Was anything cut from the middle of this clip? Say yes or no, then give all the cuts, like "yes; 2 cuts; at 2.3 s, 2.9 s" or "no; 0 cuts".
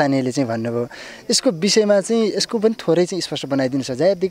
no; 0 cuts